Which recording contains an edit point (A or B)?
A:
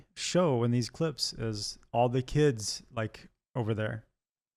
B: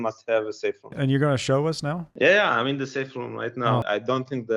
B